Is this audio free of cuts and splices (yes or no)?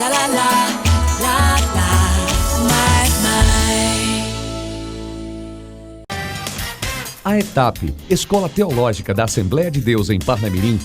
no